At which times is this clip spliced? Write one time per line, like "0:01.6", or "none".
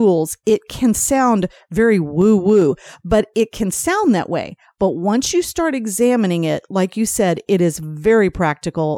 none